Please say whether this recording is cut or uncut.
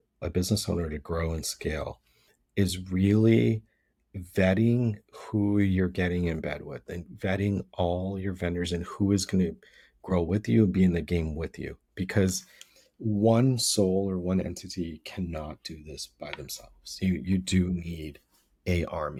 uncut